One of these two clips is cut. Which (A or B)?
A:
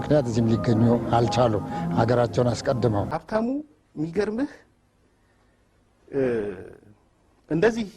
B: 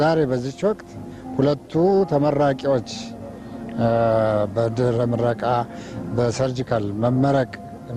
A